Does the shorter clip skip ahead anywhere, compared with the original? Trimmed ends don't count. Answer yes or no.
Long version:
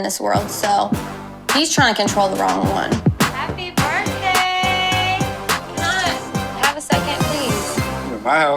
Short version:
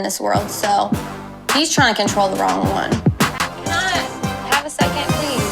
yes